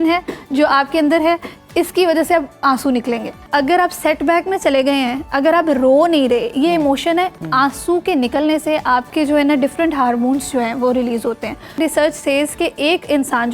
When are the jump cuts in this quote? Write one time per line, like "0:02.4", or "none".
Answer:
0:03.5
0:07.4
0:09.1
0:11.8